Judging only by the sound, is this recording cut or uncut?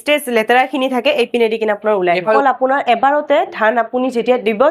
cut